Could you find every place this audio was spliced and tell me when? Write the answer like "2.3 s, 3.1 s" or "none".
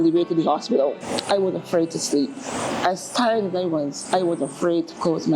1.0 s